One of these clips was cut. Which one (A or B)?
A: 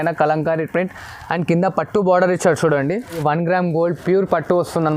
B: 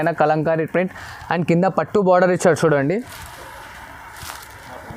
A